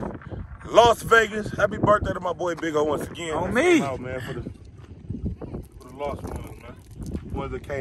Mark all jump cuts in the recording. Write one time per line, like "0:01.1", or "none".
0:03.4